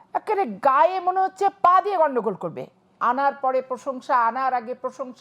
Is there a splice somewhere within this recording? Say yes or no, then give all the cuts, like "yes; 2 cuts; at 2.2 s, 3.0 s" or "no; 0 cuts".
yes; 1 cut; at 2.8 s